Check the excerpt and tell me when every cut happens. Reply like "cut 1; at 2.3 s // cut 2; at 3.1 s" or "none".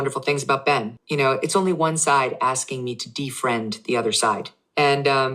cut 1; at 1.0 s